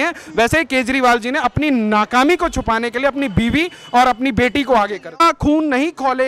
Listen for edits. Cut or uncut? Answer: cut